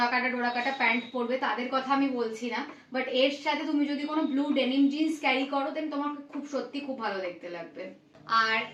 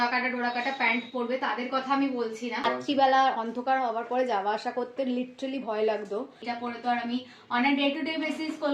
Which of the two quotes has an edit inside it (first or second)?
second